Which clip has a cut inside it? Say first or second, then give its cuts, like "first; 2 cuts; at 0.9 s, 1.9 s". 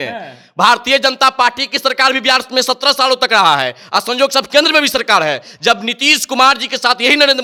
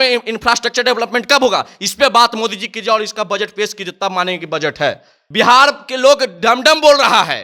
second; 1 cut; at 5.1 s